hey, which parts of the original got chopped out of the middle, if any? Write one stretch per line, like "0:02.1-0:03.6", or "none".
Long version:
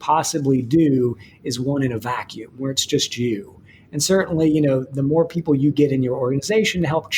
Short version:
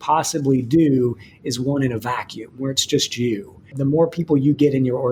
0:03.7-0:04.9